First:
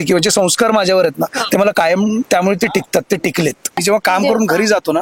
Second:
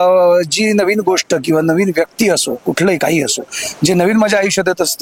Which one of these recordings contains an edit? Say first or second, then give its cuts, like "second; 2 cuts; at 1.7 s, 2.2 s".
first; 1 cut; at 3.8 s